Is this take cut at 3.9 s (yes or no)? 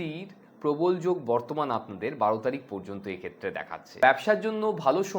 yes